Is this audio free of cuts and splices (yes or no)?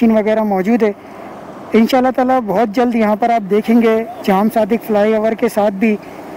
yes